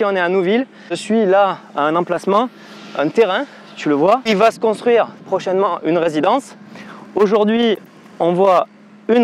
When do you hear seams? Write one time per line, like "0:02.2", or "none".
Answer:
0:00.9
0:04.3

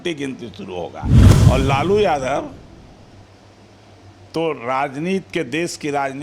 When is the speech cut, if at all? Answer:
0:01.2

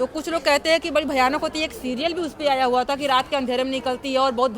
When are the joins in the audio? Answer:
none

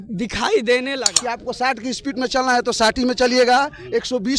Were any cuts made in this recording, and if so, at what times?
0:01.1

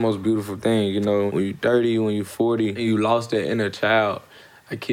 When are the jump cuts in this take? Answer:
0:01.3
0:02.8

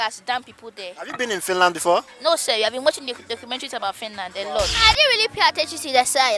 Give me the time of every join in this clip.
0:04.8

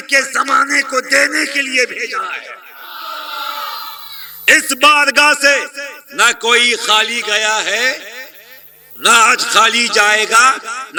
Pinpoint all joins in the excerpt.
none

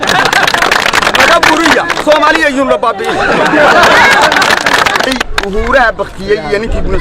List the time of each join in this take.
0:05.0

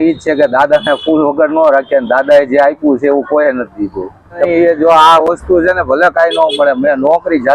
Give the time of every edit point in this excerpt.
0:04.5

